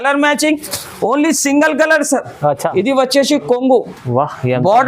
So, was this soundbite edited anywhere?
yes; 1 cut; at 2.7 s

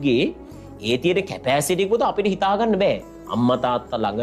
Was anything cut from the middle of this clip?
no; 0 cuts

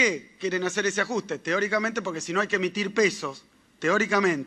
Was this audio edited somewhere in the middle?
no; 0 cuts

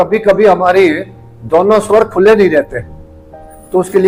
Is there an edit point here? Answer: no; 0 cuts

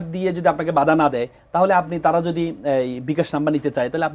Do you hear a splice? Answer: no; 0 cuts

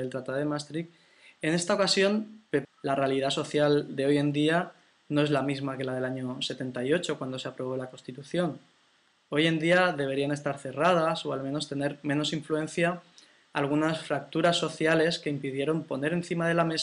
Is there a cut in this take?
no; 0 cuts

